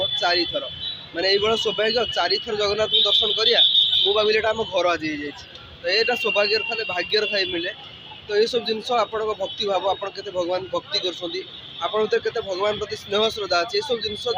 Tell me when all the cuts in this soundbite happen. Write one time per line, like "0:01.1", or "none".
none